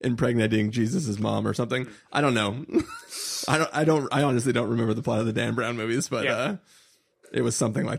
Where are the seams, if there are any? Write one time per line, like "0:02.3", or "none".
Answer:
none

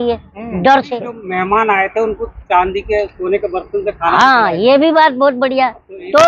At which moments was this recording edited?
0:01.2

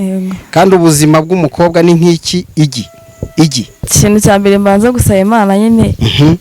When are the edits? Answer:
0:03.8

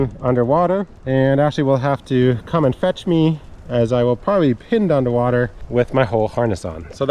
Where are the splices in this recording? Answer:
none

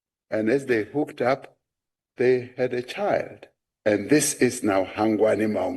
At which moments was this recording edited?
none

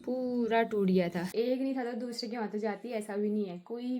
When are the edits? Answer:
0:01.3

